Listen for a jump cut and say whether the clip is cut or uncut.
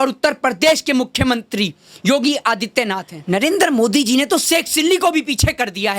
cut